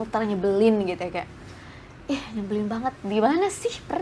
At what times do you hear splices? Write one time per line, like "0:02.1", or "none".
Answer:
none

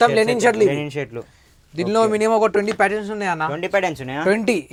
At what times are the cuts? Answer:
none

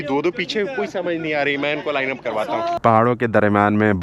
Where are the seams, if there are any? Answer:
0:02.8

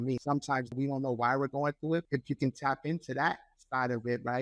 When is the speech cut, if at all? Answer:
0:00.7
0:02.1

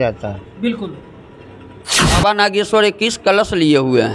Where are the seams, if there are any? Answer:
0:02.2

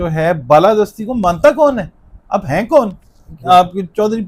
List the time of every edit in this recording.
none

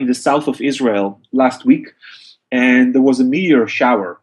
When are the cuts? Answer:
0:01.2

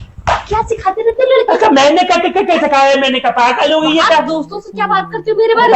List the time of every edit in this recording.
none

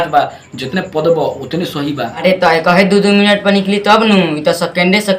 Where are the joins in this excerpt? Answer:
0:02.1

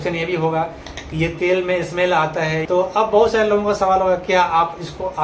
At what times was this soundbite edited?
0:02.6

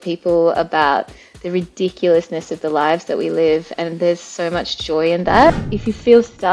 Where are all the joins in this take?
0:05.5

